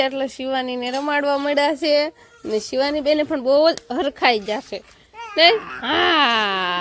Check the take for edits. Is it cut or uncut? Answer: uncut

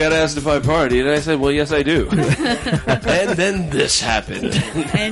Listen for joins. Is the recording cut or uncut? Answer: cut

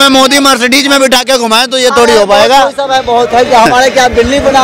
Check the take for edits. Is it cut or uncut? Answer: uncut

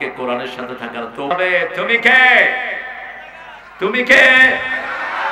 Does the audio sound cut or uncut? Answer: cut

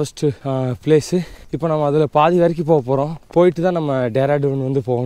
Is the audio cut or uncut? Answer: uncut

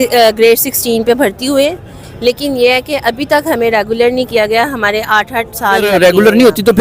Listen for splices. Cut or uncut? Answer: cut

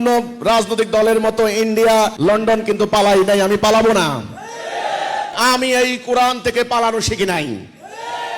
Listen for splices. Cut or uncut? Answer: cut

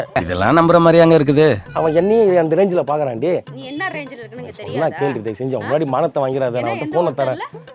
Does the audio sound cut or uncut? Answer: cut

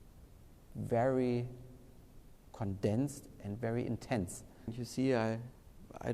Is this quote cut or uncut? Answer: cut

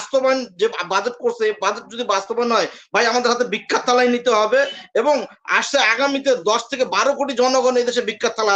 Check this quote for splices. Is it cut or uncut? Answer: uncut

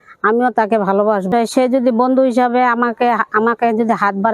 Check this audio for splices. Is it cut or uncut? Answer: cut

